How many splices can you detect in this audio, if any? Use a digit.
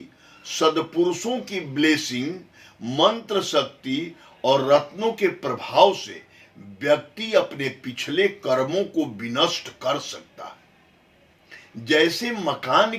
0